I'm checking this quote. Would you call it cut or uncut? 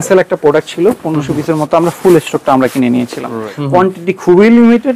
cut